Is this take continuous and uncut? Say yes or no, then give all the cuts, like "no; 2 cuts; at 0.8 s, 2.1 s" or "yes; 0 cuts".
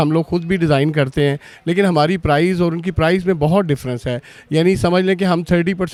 yes; 0 cuts